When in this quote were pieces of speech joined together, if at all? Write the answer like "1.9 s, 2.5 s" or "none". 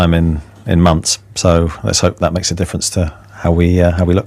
none